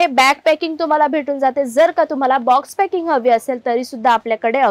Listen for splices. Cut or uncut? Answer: uncut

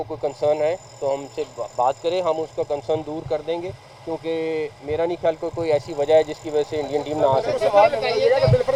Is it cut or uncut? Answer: uncut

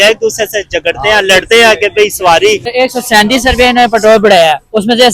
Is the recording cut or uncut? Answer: cut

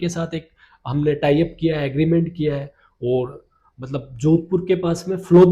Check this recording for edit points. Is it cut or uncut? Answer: uncut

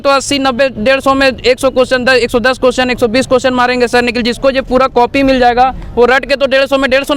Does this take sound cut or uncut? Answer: uncut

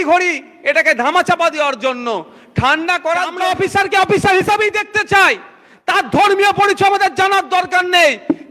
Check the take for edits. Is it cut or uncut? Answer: cut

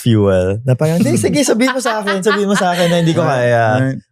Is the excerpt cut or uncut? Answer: uncut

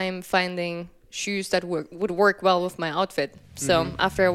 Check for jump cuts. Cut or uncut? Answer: cut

